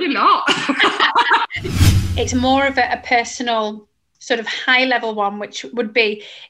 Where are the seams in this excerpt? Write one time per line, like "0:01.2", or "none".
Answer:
0:01.8